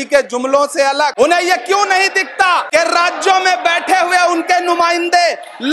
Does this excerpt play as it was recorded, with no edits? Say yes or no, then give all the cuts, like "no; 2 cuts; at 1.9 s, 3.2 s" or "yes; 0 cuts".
no; 2 cuts; at 1.1 s, 2.7 s